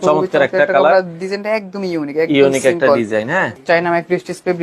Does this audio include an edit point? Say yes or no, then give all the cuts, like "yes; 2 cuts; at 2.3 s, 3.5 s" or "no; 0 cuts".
yes; 1 cut; at 3.5 s